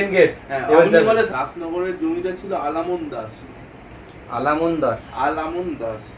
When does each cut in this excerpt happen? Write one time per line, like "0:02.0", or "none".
0:01.3